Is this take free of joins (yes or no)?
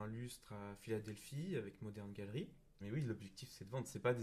no